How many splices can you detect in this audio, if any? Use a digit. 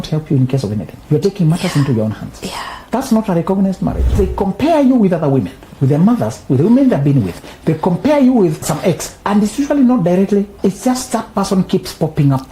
5